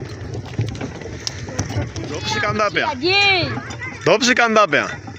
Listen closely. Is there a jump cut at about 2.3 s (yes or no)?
yes